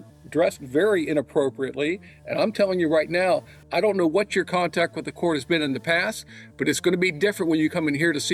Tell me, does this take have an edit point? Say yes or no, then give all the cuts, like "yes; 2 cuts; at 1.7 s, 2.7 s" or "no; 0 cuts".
no; 0 cuts